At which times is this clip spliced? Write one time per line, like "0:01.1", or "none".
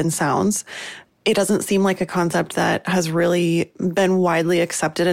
0:03.7